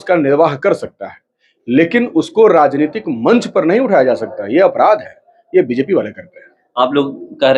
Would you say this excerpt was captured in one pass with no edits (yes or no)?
yes